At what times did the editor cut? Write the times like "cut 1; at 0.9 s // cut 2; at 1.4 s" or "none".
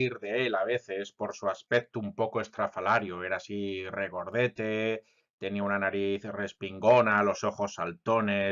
cut 1; at 1.6 s